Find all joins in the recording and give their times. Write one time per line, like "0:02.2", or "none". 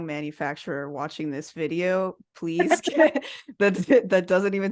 none